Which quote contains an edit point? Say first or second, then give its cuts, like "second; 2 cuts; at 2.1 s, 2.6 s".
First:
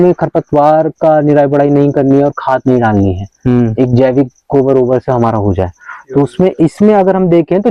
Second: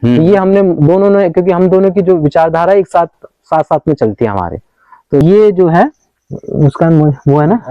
second; 1 cut; at 5.2 s